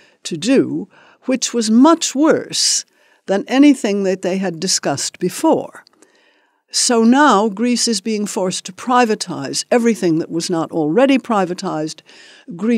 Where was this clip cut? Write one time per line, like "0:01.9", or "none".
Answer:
0:11.0